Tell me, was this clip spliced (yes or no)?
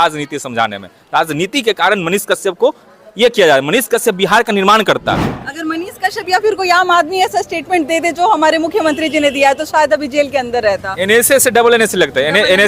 yes